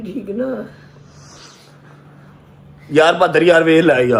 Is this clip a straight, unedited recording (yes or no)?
yes